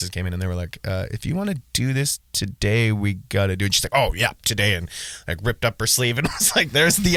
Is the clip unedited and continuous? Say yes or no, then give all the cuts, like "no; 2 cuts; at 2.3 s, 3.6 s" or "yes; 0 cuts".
yes; 0 cuts